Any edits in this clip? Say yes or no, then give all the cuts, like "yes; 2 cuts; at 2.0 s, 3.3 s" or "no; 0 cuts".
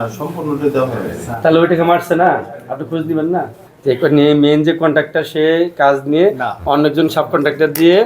yes; 1 cut; at 3.7 s